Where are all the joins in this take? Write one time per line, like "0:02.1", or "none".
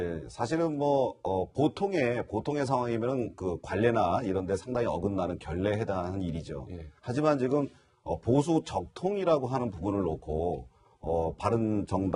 none